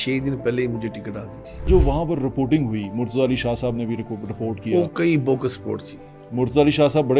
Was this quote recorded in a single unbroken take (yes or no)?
no